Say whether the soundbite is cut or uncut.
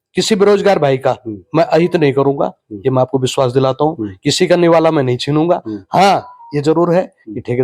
uncut